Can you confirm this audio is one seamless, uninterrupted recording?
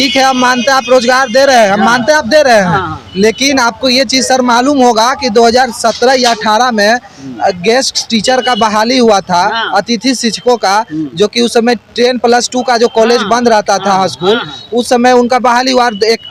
yes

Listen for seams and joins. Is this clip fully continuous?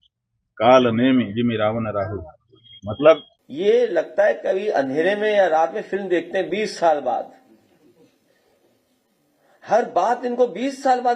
no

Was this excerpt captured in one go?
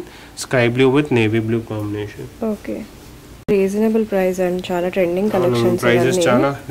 no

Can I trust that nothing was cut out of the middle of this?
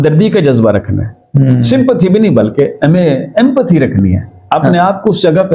yes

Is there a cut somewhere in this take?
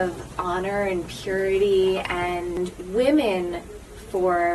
yes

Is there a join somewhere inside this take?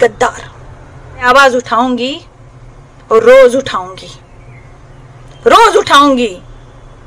yes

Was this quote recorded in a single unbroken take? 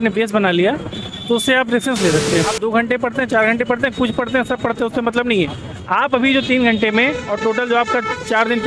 no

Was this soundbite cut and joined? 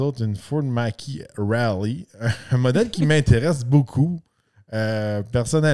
no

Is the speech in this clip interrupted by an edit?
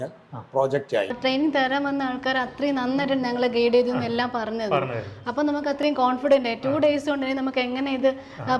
yes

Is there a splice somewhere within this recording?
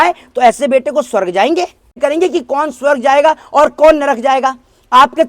yes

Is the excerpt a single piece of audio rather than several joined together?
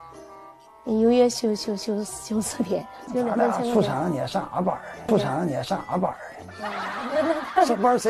no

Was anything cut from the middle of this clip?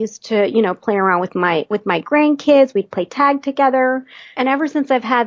yes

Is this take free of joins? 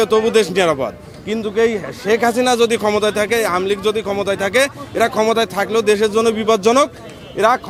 yes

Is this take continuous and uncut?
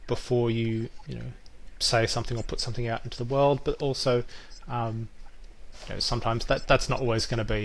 yes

